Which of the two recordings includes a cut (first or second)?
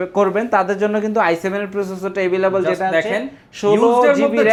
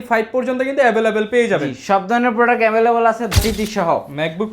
second